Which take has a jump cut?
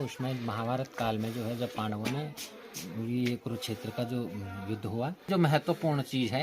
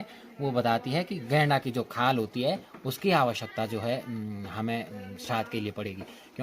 first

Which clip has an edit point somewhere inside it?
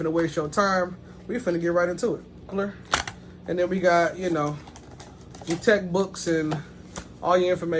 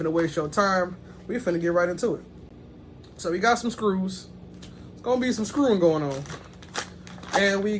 first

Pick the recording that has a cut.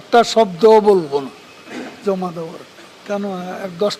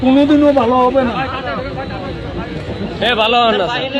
first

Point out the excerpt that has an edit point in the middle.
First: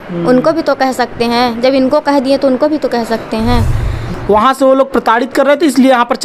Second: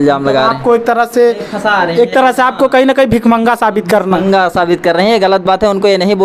first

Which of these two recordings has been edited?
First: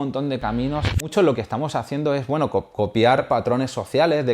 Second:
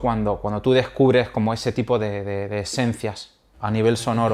first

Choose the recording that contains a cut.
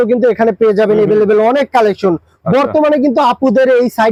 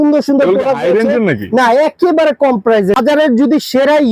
second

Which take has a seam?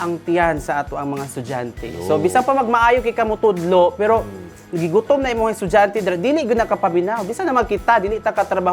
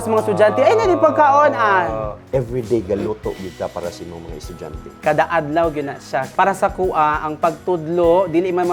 second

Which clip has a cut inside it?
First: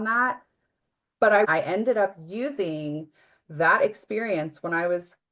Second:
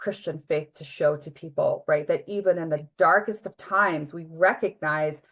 first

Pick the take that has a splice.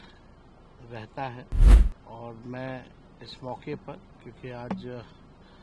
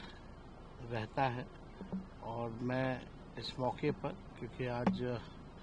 first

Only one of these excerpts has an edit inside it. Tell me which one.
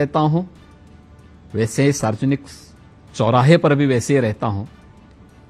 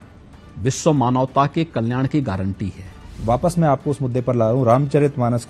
second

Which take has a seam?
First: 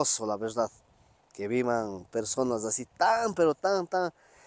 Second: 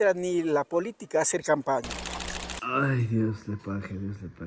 second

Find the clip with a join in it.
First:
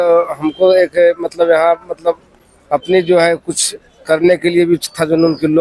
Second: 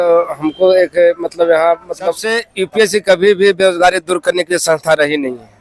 second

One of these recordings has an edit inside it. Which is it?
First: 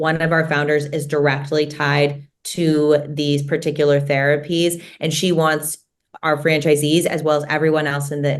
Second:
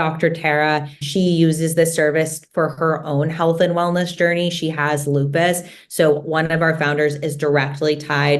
second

